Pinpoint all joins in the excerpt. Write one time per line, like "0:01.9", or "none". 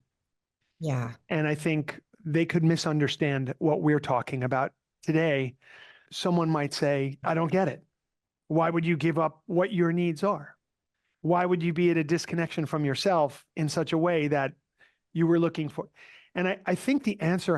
0:02.0
0:06.0
0:07.2